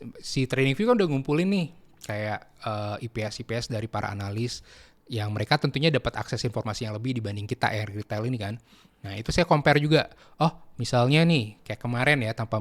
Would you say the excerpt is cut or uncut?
uncut